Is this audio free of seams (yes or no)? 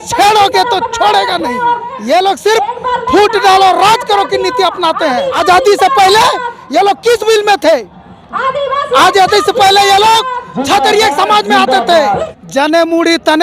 no